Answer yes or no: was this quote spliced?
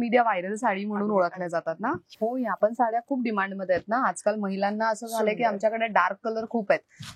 yes